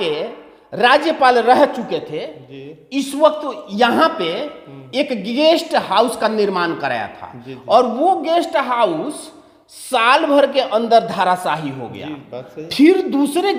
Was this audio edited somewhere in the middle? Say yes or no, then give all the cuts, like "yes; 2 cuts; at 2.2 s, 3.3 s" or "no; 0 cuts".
no; 0 cuts